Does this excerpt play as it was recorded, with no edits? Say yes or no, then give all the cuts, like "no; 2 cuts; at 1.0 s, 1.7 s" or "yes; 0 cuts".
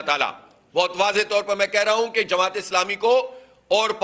yes; 0 cuts